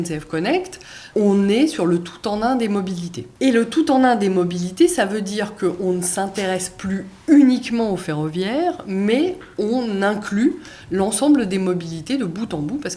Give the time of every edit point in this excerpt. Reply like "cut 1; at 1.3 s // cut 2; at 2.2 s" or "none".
cut 1; at 1.0 s // cut 2; at 3.2 s